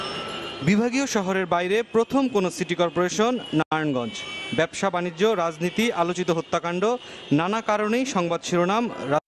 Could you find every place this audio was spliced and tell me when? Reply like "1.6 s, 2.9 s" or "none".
2.8 s